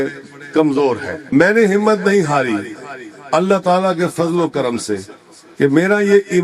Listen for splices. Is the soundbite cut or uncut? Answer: cut